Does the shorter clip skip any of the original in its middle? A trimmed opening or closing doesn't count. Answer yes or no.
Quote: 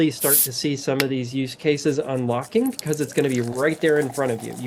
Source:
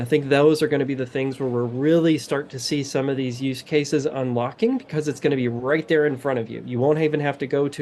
no